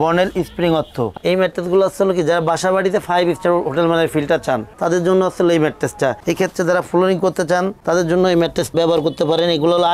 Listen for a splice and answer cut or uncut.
cut